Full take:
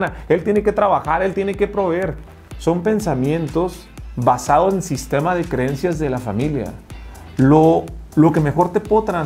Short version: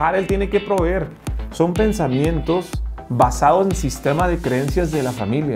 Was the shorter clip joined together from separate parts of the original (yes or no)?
no